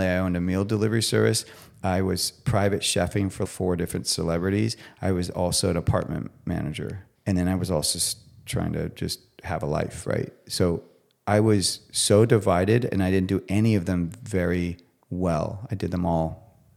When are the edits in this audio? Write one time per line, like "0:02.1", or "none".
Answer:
0:03.4
0:07.1